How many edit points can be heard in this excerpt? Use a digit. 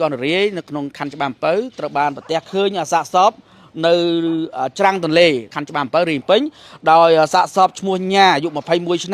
1